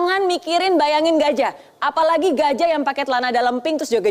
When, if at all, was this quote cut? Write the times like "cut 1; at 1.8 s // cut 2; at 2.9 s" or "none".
none